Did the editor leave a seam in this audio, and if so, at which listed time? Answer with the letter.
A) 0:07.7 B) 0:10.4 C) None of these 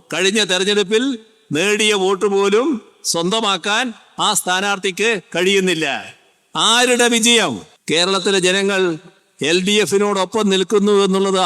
A